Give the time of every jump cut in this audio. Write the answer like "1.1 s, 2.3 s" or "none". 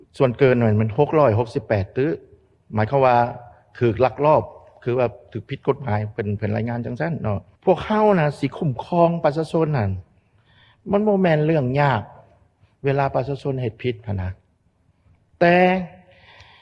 7.5 s

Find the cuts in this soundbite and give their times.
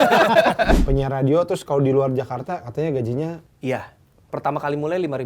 0.8 s, 3.5 s, 4.3 s

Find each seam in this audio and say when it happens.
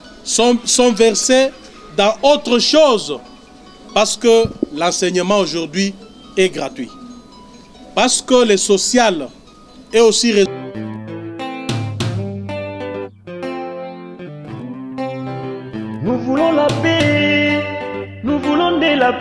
10.4 s

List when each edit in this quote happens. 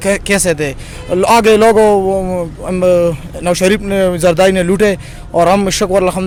none

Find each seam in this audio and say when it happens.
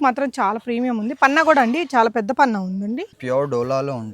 3.1 s

